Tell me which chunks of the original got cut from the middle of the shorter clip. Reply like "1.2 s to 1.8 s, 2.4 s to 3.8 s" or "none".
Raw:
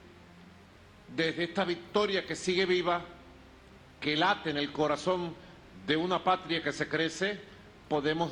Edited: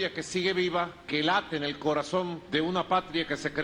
3.1 s to 3.9 s, 5.3 s to 5.7 s